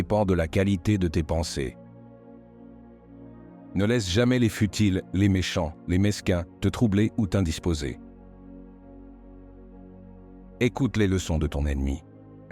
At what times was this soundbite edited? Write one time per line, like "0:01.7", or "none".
none